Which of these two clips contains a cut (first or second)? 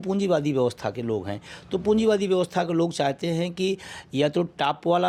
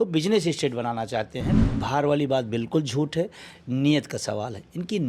second